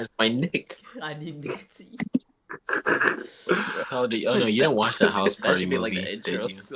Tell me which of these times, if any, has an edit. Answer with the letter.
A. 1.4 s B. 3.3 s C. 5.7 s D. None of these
D